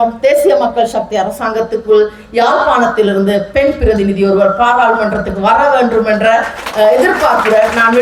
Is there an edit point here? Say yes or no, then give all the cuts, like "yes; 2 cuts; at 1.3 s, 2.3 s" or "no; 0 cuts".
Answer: no; 0 cuts